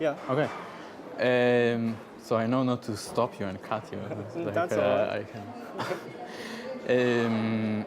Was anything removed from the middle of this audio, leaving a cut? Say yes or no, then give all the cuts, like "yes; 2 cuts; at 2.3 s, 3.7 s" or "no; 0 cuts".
yes; 1 cut; at 1.7 s